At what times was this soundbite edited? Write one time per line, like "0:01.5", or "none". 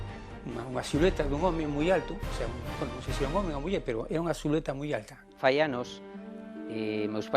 0:05.2